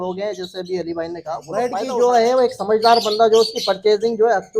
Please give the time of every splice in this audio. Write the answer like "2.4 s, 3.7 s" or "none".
1.6 s